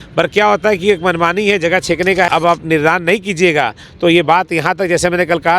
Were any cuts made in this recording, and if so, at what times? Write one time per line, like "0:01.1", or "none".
0:02.3